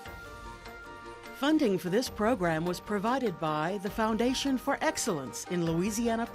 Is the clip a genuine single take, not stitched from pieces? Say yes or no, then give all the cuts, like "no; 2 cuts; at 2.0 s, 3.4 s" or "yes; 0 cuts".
no; 1 cut; at 1.3 s